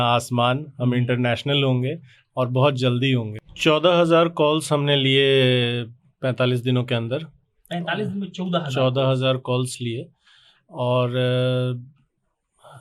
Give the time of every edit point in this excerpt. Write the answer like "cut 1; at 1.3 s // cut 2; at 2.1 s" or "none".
cut 1; at 3.4 s